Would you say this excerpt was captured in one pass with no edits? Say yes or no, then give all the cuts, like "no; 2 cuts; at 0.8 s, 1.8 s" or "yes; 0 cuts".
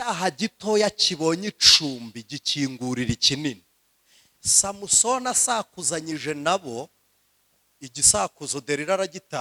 yes; 0 cuts